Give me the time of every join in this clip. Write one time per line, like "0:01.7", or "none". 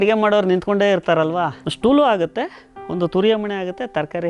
0:01.6